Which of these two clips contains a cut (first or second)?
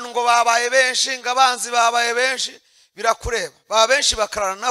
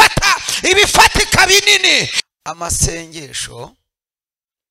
second